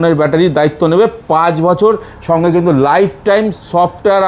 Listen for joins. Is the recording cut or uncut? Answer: uncut